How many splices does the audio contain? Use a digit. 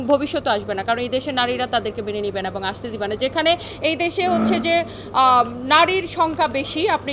0